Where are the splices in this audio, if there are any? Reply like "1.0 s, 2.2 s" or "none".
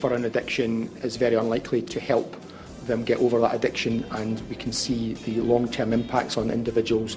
0.9 s, 1.9 s